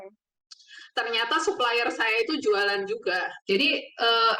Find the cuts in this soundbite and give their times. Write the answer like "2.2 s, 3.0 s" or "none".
3.3 s